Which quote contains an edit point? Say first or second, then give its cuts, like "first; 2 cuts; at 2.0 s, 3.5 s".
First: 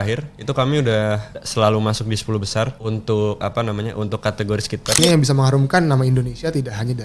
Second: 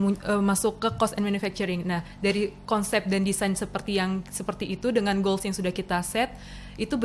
first; 3 cuts; at 1.4 s, 2.8 s, 5.0 s